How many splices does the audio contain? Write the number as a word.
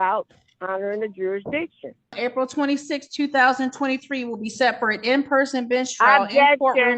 one